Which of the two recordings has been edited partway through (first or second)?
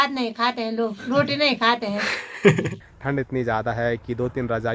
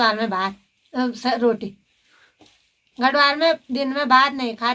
first